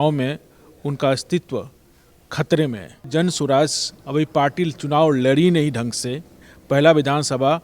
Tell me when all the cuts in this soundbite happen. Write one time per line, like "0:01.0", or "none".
0:03.1